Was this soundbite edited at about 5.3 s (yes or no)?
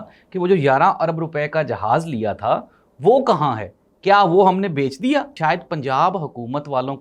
yes